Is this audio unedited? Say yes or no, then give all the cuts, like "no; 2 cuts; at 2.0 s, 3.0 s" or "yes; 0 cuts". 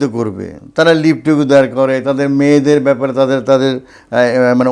yes; 0 cuts